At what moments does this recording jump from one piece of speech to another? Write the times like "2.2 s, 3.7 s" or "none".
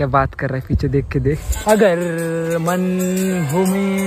1.5 s

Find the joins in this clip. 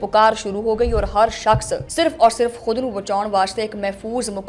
1.8 s

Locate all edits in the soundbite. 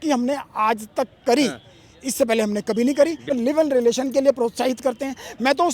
3.3 s

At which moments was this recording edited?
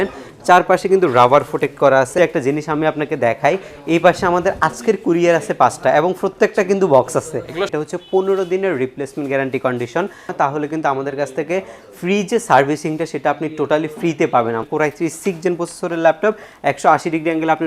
2.2 s, 7.7 s, 10.3 s, 14.7 s

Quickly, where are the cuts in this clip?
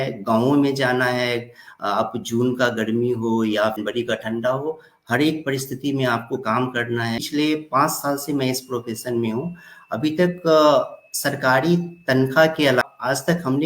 3.8 s, 7.3 s, 12.8 s

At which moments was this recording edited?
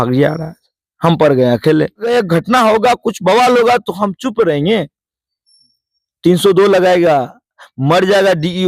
2.0 s

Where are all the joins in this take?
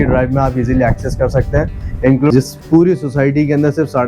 2.3 s

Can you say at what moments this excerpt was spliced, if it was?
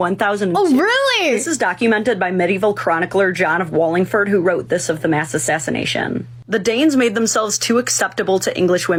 none

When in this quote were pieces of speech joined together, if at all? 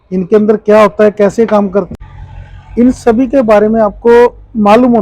1.9 s

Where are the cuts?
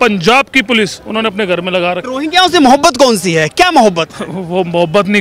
2.1 s

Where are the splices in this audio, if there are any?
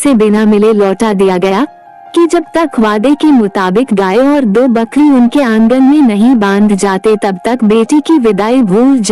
none

